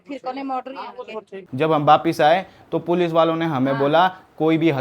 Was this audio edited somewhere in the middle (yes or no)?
yes